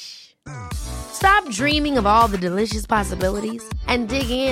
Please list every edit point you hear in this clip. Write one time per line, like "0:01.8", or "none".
none

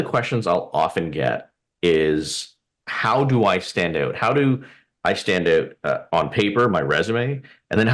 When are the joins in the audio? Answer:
none

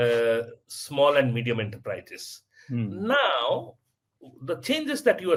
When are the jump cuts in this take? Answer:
none

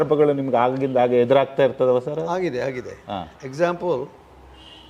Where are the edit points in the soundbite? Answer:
none

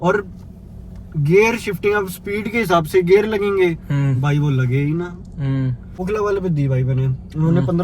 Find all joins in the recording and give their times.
0:06.0

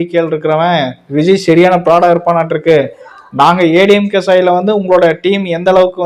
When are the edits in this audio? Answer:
none

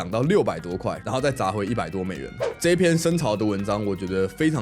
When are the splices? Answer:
0:01.0
0:02.4

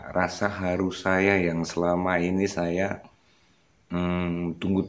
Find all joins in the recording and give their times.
none

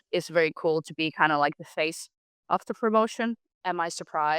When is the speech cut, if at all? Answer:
0:03.5

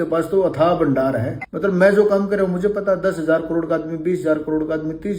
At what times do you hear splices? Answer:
0:01.4

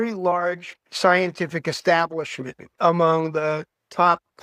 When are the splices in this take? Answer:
0:02.7

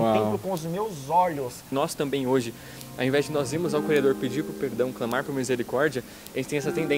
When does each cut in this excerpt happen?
0:01.6

